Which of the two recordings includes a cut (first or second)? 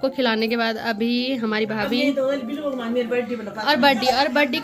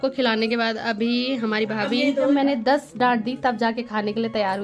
second